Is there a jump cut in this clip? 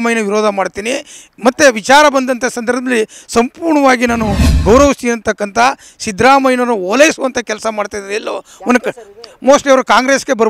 no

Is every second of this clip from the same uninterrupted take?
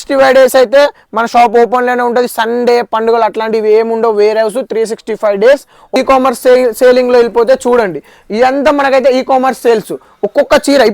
no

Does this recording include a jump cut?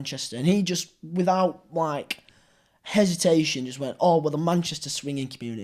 no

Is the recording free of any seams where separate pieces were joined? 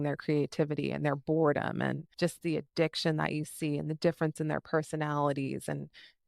no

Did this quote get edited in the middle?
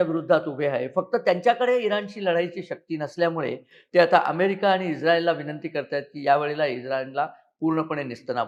no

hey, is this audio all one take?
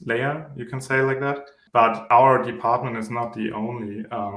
no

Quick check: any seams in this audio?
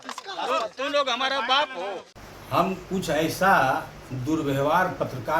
yes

